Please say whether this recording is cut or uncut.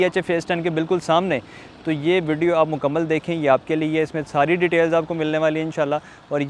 uncut